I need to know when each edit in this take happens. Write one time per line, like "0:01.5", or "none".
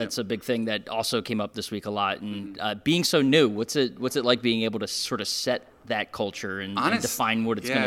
none